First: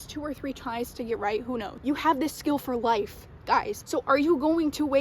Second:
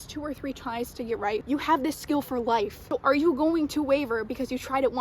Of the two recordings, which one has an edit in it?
second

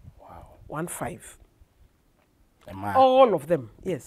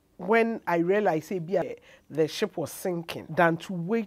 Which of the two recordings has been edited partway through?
second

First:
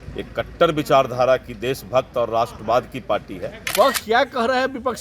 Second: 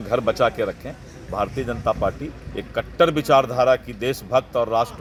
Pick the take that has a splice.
first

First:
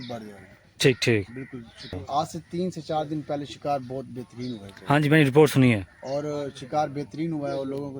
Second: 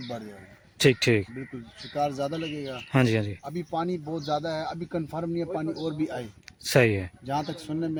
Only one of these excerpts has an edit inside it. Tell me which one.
first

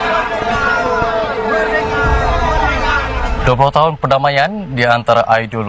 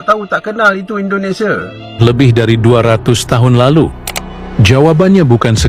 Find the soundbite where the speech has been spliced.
second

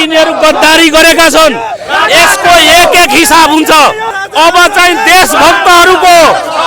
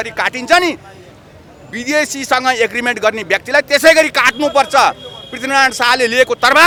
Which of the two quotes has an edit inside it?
first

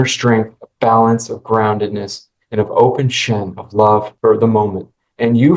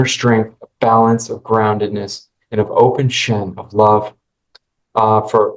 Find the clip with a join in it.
first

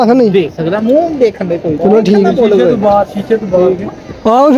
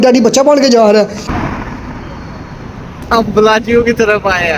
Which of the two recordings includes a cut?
second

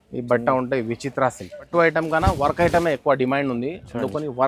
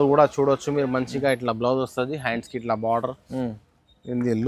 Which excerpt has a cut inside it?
first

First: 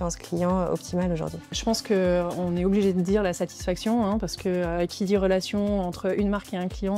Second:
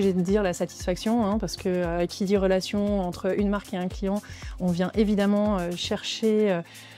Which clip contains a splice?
first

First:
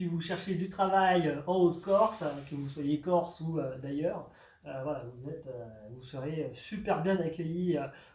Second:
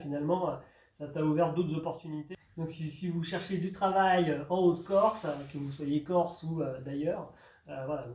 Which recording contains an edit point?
second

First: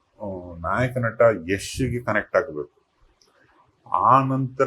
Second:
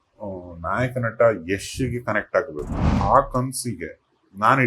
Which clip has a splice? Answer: second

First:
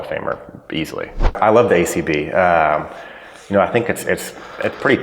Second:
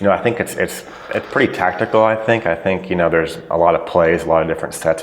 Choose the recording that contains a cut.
first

